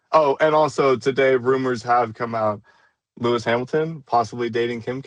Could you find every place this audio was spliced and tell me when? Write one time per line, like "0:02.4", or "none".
none